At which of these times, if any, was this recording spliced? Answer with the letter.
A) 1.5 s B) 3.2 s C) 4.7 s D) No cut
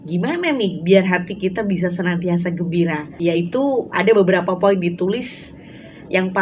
D